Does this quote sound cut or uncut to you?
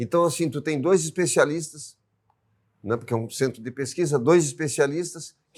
uncut